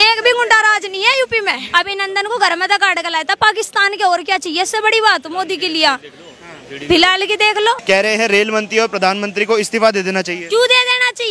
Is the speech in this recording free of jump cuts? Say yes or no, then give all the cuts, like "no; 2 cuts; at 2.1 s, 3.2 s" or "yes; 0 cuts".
no; 2 cuts; at 1.6 s, 7.8 s